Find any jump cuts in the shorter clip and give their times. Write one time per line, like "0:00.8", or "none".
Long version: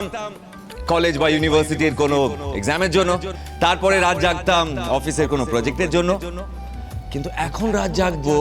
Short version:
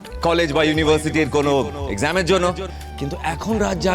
0:02.7